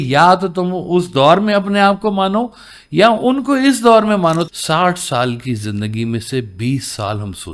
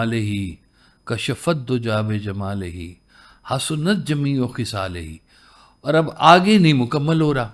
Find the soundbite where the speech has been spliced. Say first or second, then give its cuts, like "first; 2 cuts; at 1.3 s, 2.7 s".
first; 1 cut; at 4.5 s